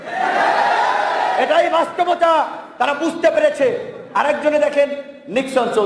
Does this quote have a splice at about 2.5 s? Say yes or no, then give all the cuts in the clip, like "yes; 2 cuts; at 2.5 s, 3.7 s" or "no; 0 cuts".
no; 0 cuts